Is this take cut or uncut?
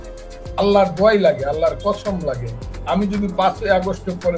uncut